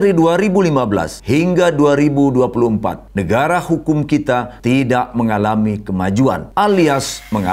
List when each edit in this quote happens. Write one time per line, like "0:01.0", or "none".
0:01.1
0:03.0
0:04.5
0:06.4